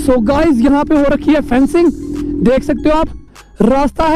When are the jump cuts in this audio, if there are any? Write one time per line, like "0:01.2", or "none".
none